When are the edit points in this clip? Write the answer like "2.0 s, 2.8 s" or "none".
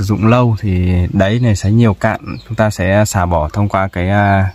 none